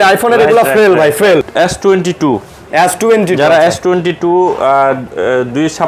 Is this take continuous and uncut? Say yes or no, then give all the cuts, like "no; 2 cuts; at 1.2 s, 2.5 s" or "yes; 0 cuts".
no; 1 cut; at 1.5 s